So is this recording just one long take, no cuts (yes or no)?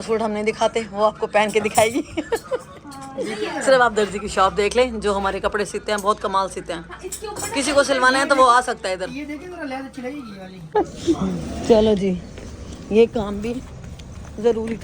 yes